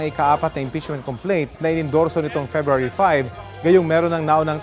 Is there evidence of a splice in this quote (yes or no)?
no